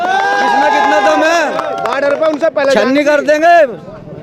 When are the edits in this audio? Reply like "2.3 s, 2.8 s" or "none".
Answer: none

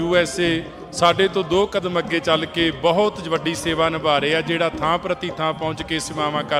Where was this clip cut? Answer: none

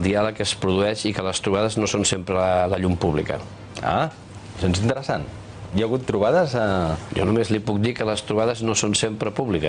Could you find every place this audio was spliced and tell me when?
none

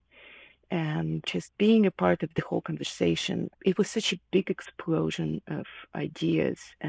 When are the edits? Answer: 1.2 s, 3.5 s

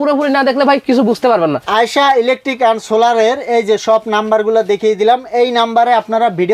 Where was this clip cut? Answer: 1.6 s

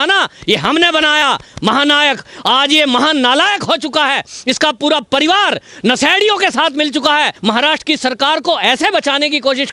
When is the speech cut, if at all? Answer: 7.3 s

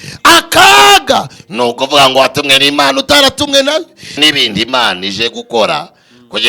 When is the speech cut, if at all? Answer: 4.1 s

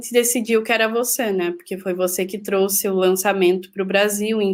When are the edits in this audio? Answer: none

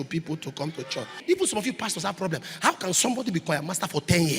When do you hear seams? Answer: 1.2 s

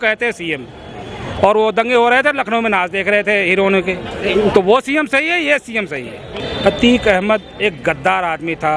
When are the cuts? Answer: 6.4 s

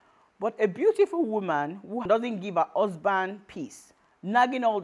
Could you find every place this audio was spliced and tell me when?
2.0 s

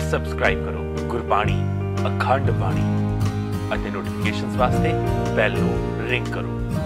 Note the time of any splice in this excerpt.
none

